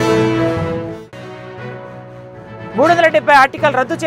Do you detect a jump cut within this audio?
yes; 1 cut; at 2.4 s

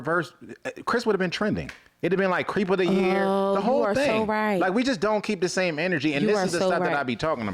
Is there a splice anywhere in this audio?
no; 0 cuts

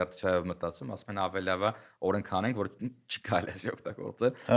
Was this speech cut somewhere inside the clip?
no; 0 cuts

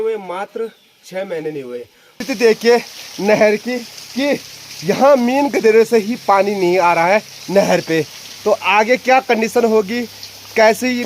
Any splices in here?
yes; 1 cut; at 2.1 s

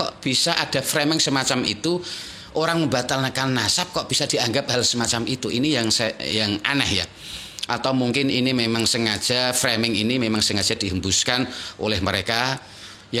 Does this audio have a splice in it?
no; 0 cuts

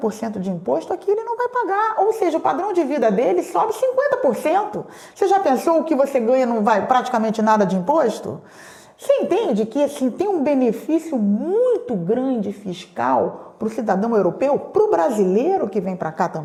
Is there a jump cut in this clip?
no; 0 cuts

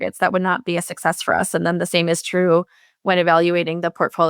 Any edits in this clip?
no; 0 cuts

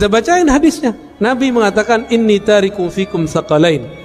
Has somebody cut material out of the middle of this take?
yes; 1 cut; at 1.1 s

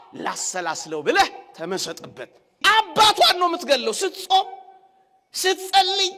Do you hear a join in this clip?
yes; 1 cut; at 2.6 s

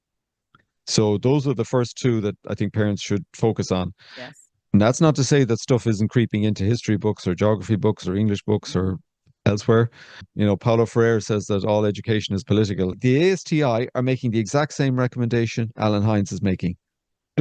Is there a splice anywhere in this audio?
yes; 2 cuts; at 10.3 s, 12.9 s

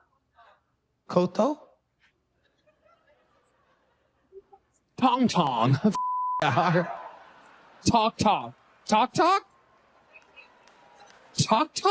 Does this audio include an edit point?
no; 0 cuts

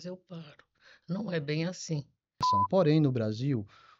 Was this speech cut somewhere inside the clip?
yes; 1 cut; at 2.5 s

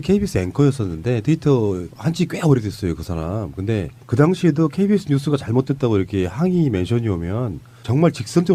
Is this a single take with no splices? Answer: no; 1 cut; at 6.9 s

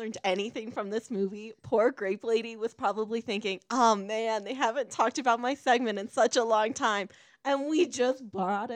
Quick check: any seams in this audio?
no; 0 cuts

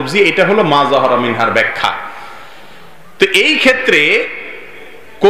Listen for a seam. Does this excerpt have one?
no; 0 cuts

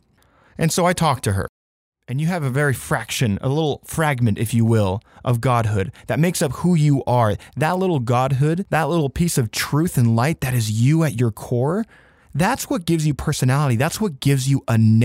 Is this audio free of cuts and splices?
no; 1 cut; at 1.5 s

